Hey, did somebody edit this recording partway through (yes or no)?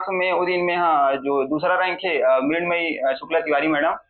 no